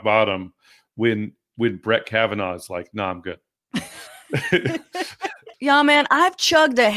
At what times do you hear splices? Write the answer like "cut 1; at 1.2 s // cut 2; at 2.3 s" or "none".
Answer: cut 1; at 3.5 s // cut 2; at 5.4 s